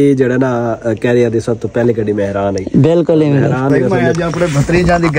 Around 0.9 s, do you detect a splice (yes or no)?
no